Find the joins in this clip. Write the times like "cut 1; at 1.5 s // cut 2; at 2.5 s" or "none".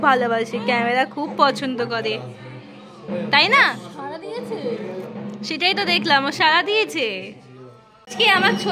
none